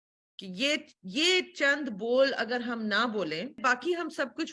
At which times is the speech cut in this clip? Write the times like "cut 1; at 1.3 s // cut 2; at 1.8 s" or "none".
cut 1; at 3.6 s